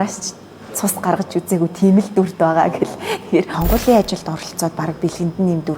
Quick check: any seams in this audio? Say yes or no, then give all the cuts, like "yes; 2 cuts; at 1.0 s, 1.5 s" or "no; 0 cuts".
yes; 1 cut; at 3.6 s